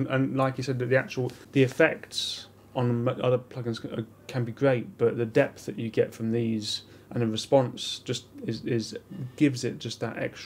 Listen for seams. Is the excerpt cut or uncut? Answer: cut